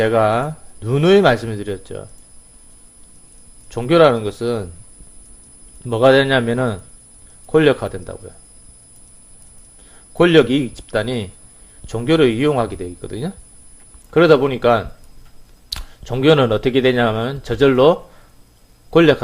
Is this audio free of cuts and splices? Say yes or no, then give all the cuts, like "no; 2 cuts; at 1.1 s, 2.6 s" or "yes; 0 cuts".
no; 1 cut; at 18.1 s